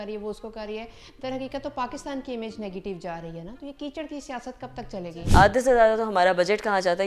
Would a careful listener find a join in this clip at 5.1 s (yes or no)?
yes